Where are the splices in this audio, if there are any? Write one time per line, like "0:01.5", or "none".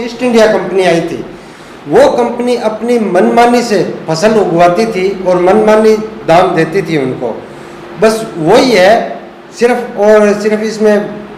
none